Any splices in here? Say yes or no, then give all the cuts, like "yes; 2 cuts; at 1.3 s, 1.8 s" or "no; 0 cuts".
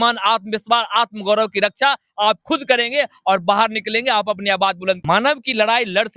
yes; 1 cut; at 5.0 s